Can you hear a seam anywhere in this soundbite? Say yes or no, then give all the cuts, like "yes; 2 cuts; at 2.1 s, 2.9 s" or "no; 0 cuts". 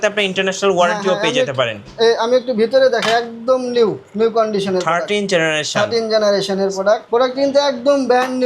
yes; 1 cut; at 7.0 s